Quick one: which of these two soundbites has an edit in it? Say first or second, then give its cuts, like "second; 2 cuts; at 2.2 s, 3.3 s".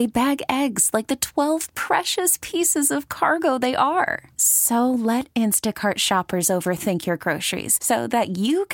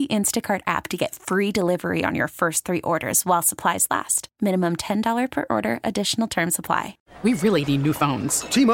second; 1 cut; at 7.0 s